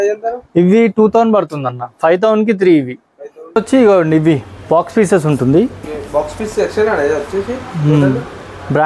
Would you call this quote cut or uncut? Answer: cut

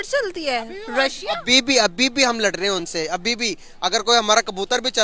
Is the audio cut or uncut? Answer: uncut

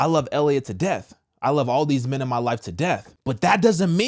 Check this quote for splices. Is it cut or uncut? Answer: cut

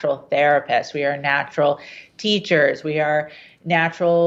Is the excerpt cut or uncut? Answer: uncut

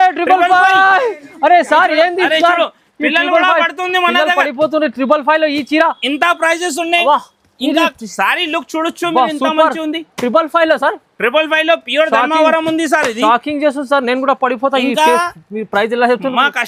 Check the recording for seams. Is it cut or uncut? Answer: uncut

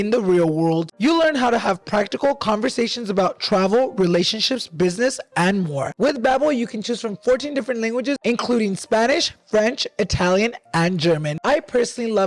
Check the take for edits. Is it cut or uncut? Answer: cut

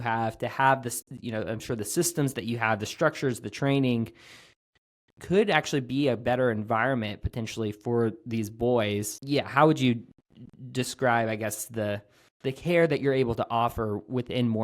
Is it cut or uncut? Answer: cut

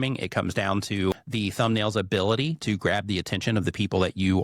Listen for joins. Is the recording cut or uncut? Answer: cut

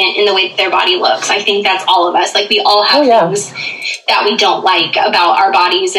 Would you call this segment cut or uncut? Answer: uncut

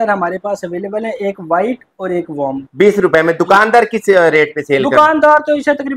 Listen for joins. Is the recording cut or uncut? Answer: cut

